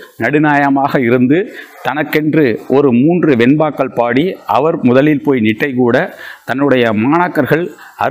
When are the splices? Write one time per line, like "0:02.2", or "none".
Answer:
none